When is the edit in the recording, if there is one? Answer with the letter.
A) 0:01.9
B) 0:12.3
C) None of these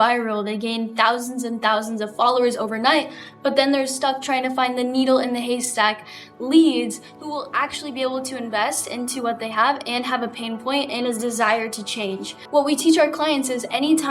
B